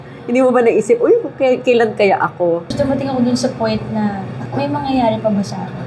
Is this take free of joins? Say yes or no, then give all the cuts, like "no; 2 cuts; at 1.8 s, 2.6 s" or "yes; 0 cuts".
no; 1 cut; at 2.7 s